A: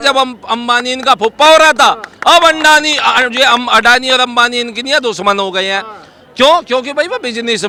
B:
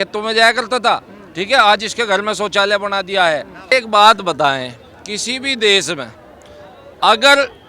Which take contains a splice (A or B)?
B